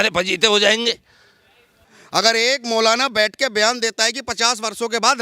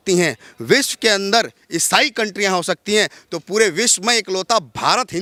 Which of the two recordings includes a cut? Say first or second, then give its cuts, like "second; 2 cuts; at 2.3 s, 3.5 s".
first; 1 cut; at 1.9 s